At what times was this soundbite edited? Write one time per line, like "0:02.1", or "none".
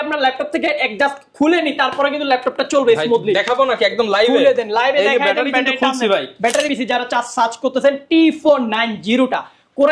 0:06.7